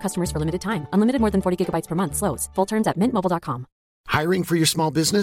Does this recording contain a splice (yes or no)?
no